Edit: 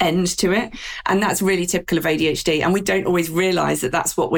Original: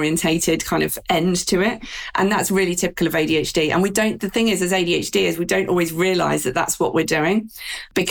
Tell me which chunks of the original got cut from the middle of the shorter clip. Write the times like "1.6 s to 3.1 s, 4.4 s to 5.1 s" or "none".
3.9 s to 5.5 s